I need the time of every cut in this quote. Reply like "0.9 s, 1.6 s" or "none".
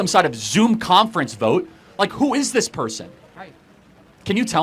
none